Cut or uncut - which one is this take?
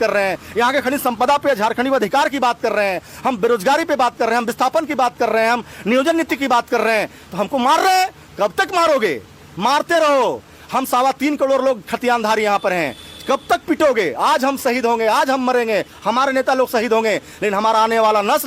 uncut